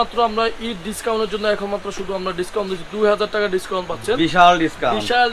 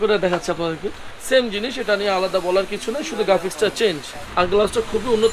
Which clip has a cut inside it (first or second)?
second